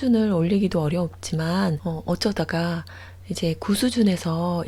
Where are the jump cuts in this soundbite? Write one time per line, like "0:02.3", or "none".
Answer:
none